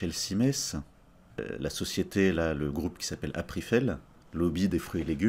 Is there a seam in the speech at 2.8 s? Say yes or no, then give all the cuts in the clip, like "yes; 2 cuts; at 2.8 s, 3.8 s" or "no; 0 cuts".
no; 2 cuts; at 1.5 s, 4.1 s